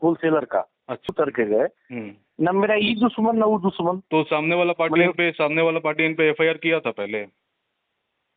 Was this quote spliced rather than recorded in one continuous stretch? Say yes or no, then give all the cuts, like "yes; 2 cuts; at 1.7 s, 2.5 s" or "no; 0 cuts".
yes; 1 cut; at 1.1 s